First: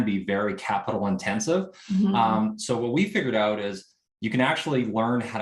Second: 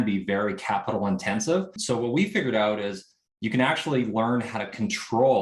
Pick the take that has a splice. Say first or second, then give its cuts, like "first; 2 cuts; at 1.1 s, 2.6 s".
second; 1 cut; at 1.8 s